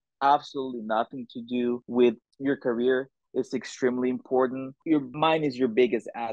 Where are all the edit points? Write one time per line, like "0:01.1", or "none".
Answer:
0:01.8
0:04.9

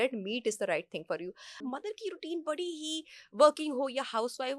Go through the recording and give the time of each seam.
0:01.5

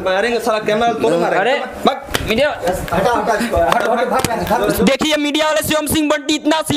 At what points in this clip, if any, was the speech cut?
none

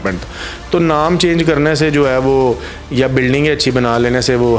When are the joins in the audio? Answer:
none

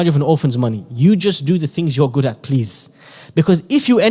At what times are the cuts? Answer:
none

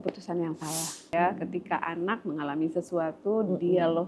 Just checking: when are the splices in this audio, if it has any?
0:01.1

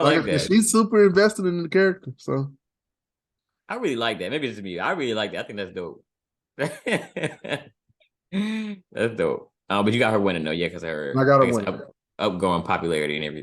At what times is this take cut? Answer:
none

